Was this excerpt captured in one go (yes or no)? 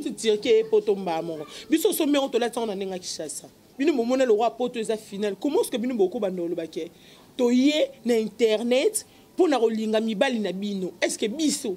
no